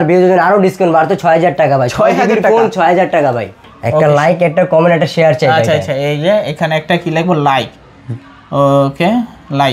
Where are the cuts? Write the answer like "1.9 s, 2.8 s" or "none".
3.6 s